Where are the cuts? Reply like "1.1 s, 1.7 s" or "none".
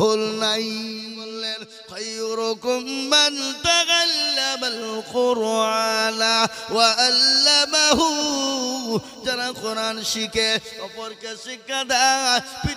1.1 s